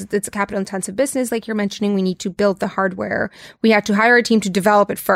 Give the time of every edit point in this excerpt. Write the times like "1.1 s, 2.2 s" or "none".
none